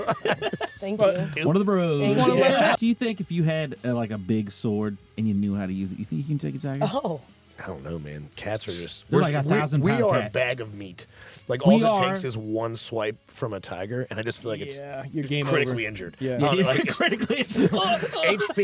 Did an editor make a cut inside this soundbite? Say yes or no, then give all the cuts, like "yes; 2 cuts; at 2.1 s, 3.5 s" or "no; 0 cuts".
yes; 1 cut; at 2.8 s